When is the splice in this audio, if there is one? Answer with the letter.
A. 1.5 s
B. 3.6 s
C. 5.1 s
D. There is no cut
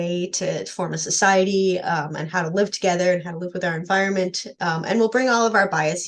D